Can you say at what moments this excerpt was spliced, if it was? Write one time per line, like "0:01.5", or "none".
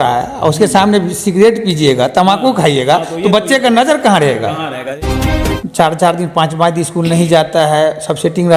0:05.1

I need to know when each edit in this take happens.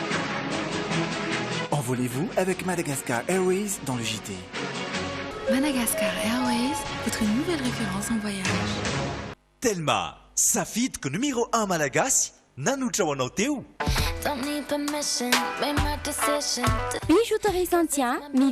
none

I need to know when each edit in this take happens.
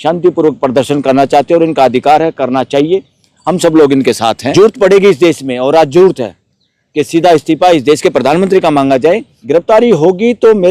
0:04.5
0:09.3

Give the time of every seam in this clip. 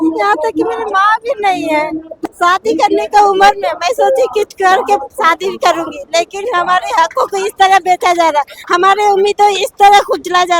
0:02.1

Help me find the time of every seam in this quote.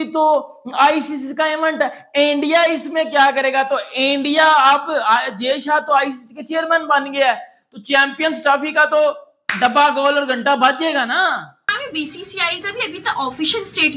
0:11.7

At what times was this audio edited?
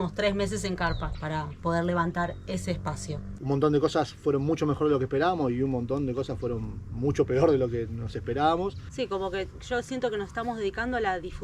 0:01.1
0:03.4
0:08.8

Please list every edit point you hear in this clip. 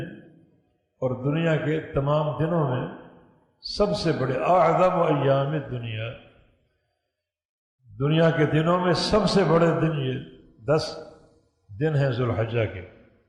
none

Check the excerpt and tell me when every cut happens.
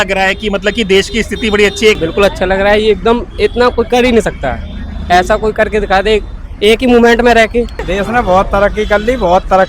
0:02.0
0:07.8

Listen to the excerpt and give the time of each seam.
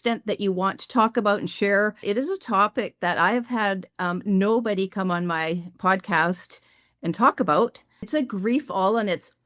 0:02.0
0:08.1

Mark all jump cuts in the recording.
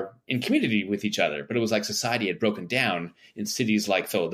none

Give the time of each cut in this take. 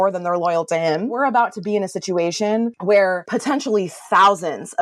0:01.2
0:03.0

